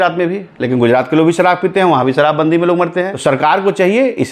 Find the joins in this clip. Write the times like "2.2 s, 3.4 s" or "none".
3.1 s